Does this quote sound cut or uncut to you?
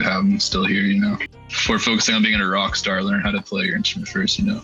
cut